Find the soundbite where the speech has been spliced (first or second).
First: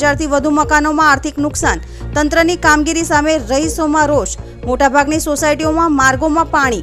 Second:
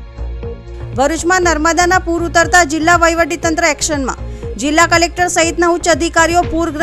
second